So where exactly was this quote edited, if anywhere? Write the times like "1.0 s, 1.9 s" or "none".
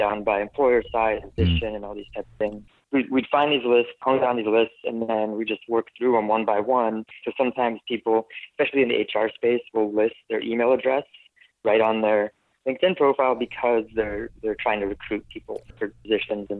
1.4 s, 2.7 s, 4.0 s, 7.2 s